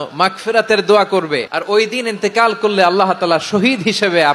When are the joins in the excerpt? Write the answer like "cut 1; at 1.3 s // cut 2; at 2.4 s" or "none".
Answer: cut 1; at 1.5 s